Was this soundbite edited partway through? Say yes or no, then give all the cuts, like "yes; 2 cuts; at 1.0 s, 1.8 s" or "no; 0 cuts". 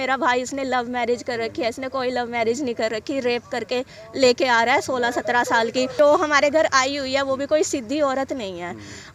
yes; 1 cut; at 5.9 s